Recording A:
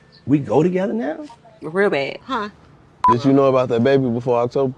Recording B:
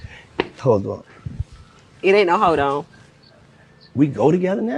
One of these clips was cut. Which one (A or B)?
A